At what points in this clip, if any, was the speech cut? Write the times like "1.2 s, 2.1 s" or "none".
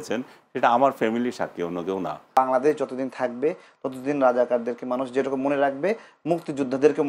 2.4 s